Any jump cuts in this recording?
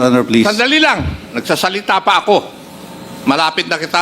no; 0 cuts

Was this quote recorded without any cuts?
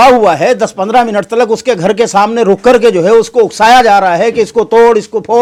yes; 0 cuts

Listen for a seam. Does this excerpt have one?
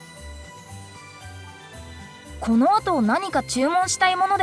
no; 0 cuts

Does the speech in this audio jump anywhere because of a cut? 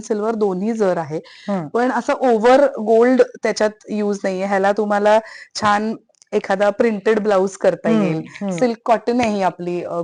no; 0 cuts

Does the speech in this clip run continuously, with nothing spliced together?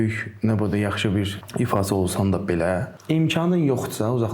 no; 2 cuts; at 1.4 s, 2.9 s

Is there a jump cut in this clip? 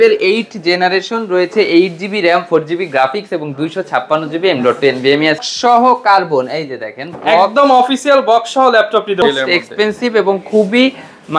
yes; 2 cuts; at 5.4 s, 9.2 s

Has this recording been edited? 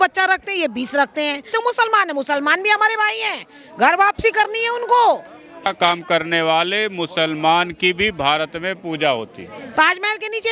yes; 3 cuts; at 1.5 s, 5.7 s, 9.6 s

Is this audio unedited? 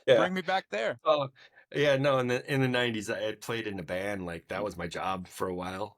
no; 1 cut; at 1.0 s

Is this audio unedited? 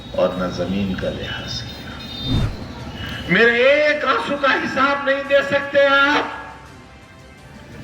no; 1 cut; at 2.4 s

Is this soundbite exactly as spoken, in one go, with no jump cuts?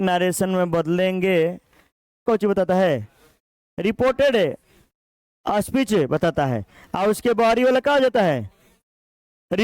no; 1 cut; at 2.2 s

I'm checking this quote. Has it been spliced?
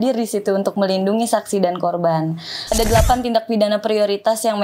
yes; 1 cut; at 2.7 s

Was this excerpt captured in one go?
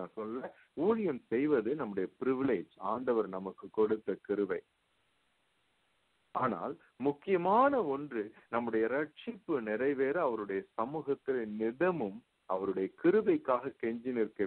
yes; 0 cuts

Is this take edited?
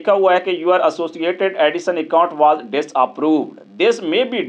no; 0 cuts

